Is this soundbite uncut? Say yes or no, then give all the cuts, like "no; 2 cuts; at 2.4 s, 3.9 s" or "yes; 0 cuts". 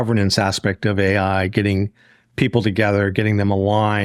yes; 0 cuts